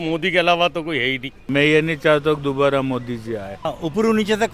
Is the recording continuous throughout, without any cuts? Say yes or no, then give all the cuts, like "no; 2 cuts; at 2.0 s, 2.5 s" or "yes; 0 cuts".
no; 2 cuts; at 1.4 s, 3.6 s